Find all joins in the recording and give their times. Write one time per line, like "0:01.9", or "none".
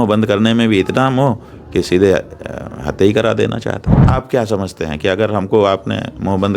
0:03.9